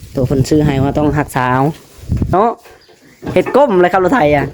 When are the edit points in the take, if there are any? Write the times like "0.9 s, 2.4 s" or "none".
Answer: 2.3 s